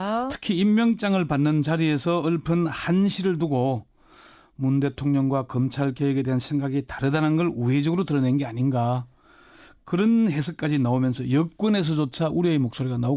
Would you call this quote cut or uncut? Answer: cut